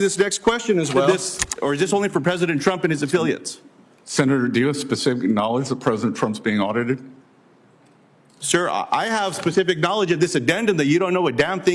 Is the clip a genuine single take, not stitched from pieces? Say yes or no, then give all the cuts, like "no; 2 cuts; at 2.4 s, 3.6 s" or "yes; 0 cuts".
no; 1 cut; at 1.1 s